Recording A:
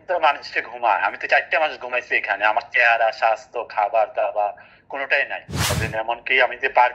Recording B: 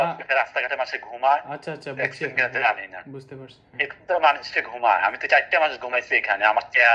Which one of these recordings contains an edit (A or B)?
A